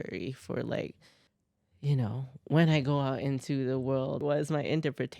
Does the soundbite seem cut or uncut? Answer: cut